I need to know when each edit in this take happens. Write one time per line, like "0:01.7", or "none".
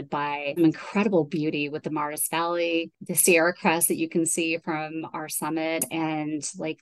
0:05.9